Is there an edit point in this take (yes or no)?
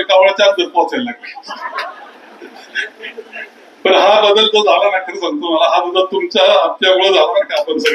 no